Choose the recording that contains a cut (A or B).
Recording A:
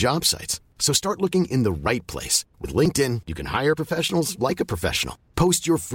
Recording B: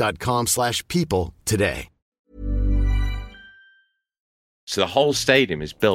B